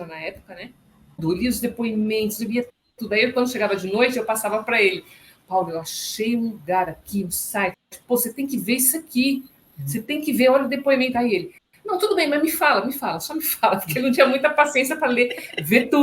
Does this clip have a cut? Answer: yes; 1 cut; at 1.2 s

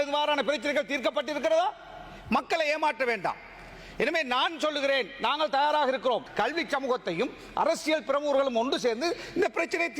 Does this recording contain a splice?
yes; 1 cut; at 6.3 s

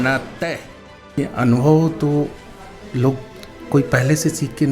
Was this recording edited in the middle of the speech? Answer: yes; 1 cut; at 1.1 s

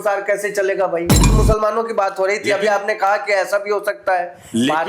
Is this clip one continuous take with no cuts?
no; 1 cut; at 1.3 s

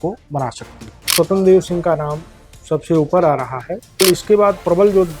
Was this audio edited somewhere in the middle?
yes; 2 cuts; at 1.1 s, 4.0 s

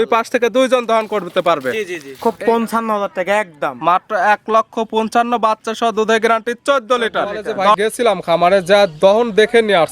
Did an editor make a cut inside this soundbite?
yes; 2 cuts; at 2.2 s, 7.8 s

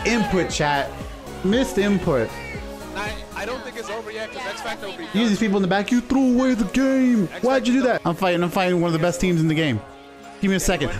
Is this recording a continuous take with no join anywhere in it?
no; 1 cut; at 8.0 s

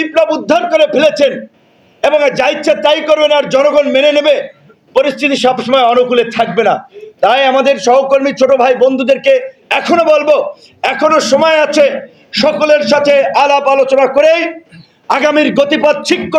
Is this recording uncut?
yes; 0 cuts

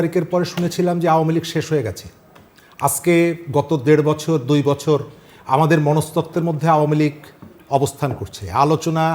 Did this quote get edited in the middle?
no; 0 cuts

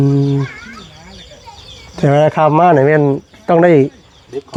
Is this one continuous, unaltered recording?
yes; 0 cuts

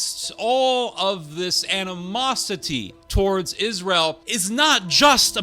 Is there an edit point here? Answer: yes; 2 cuts; at 3.0 s, 4.3 s

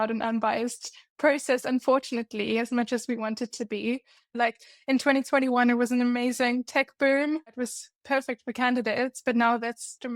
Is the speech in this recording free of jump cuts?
no; 2 cuts; at 4.3 s, 7.5 s

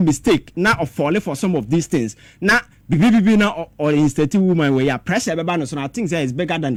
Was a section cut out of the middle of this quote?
no; 0 cuts

